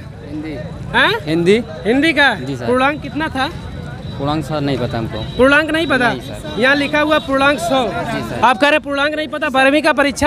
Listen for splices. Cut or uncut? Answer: uncut